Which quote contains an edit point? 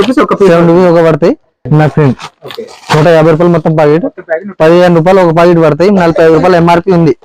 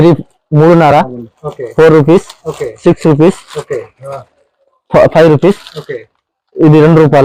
first; 1 cut; at 1.7 s

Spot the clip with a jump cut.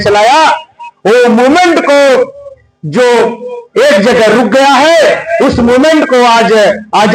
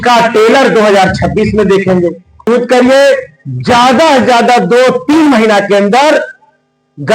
second; 1 cut; at 2.5 s

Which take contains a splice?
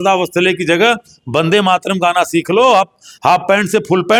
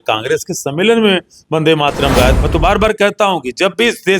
second; 1 cut; at 2.4 s

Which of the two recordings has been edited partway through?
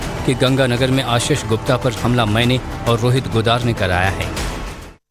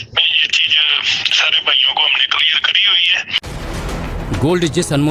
second; 1 cut; at 1.6 s

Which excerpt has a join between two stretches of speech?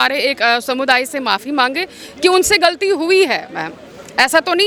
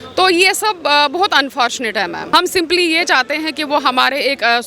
second; 1 cut; at 2.2 s

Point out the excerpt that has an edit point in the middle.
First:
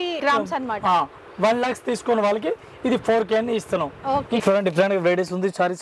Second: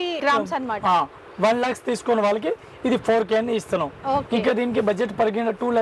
first; 1 cut; at 4.4 s

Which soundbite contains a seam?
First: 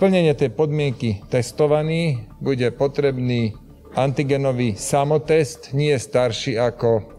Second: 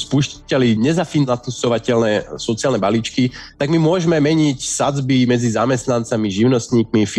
second; 1 cut; at 1.3 s

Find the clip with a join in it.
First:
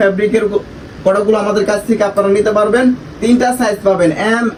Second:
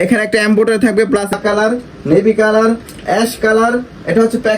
second; 1 cut; at 1.3 s

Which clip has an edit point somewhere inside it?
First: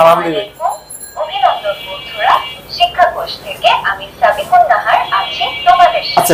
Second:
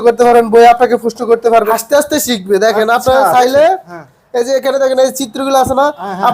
second; 1 cut; at 1.7 s

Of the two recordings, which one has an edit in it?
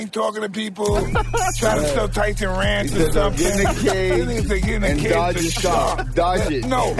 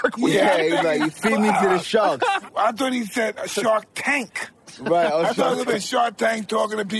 second; 1 cut; at 2.4 s

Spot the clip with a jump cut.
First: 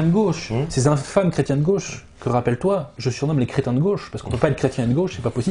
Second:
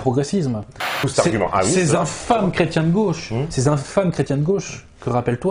second; 1 cut; at 1.0 s

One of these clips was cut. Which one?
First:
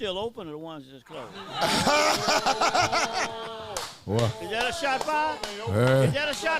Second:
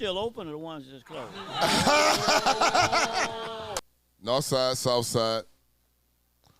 second; 1 cut; at 3.9 s

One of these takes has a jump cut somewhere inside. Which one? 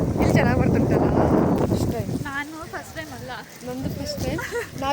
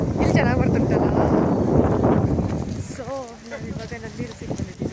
first; 1 cut; at 1.6 s

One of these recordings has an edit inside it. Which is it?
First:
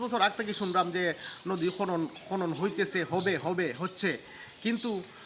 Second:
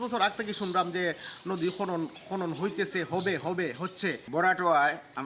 second; 1 cut; at 4.2 s

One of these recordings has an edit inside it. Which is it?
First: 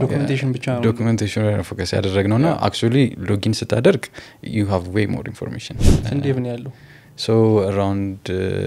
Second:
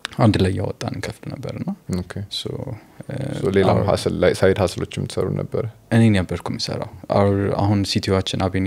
first; 1 cut; at 5.8 s

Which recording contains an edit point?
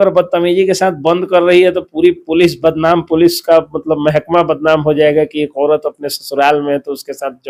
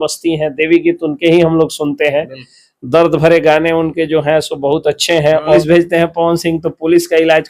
second; 1 cut; at 5.6 s

